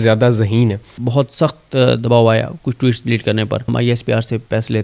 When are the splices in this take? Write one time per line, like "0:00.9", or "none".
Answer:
0:01.0
0:03.7